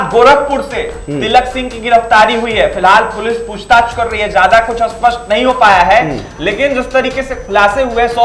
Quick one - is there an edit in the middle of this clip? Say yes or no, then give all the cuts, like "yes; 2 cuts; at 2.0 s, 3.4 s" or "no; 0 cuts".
no; 0 cuts